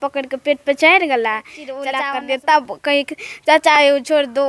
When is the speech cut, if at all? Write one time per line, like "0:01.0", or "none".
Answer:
0:01.8